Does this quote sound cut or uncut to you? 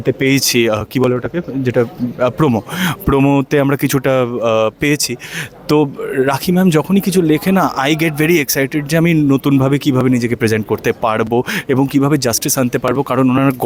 uncut